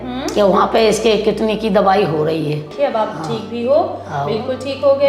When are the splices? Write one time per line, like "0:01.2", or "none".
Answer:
0:02.7